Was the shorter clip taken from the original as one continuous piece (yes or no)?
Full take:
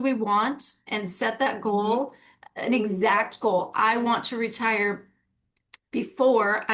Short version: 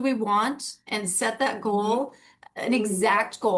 yes